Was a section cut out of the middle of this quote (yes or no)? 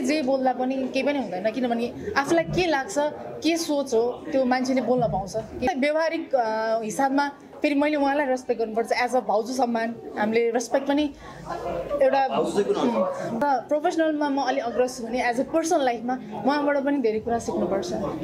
yes